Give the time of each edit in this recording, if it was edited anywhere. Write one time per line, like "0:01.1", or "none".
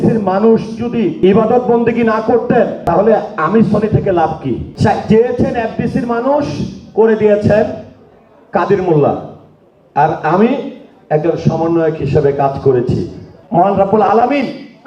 0:01.1
0:02.8
0:04.7
0:13.3